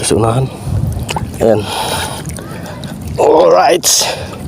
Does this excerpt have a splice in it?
yes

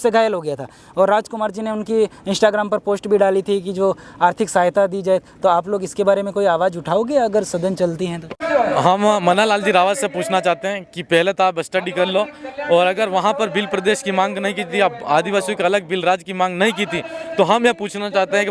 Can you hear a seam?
yes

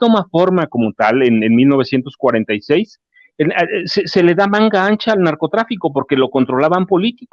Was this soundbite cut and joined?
no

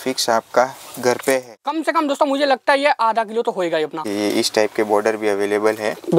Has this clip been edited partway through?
yes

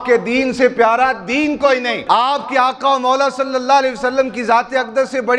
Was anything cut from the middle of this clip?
yes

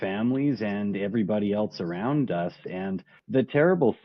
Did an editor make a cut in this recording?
yes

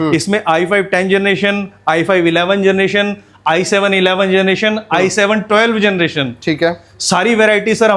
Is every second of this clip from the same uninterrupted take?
yes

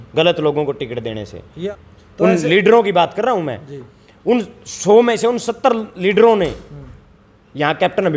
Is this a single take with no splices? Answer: no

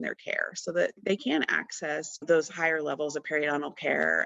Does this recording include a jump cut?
yes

